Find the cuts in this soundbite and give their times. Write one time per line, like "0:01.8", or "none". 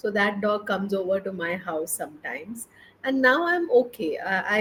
none